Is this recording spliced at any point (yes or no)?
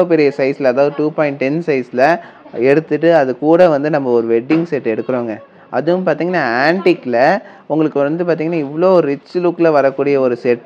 no